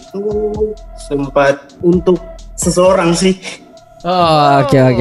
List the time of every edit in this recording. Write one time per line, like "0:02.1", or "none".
0:00.9
0:01.7

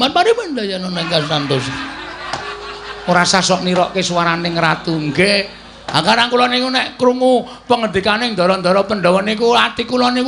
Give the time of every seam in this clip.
none

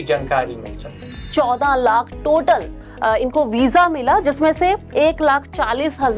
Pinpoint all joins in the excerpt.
0:01.0
0:02.8

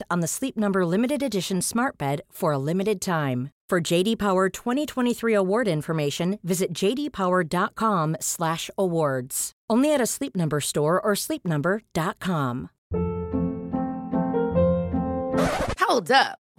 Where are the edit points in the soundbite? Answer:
0:12.8

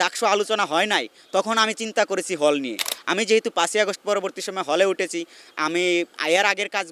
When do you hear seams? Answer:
none

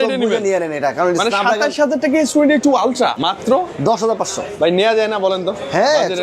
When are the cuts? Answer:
0:03.2

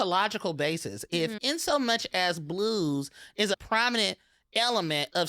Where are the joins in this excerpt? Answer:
0:03.6

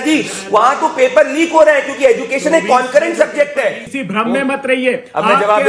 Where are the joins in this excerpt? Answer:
0:03.9

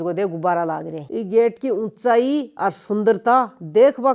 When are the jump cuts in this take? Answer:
0:01.1

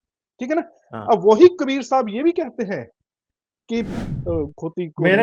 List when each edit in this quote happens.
0:04.0

